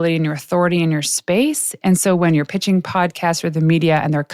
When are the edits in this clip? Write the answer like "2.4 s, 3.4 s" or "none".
none